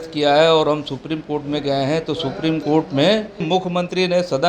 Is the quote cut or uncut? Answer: cut